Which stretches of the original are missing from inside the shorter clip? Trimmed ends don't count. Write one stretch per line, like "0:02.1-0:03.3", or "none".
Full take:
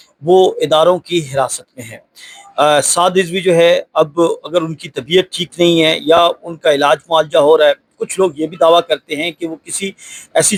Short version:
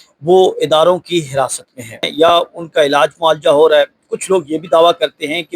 0:02.1-0:06.0